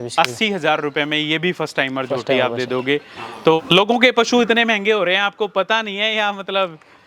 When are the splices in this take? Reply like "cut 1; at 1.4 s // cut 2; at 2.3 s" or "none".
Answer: cut 1; at 3.6 s